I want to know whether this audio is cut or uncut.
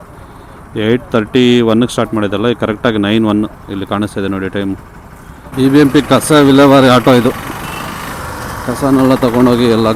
uncut